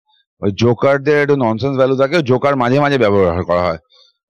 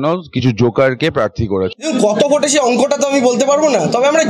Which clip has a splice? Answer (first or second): second